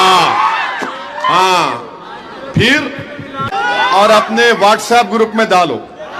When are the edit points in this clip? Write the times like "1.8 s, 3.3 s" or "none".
3.4 s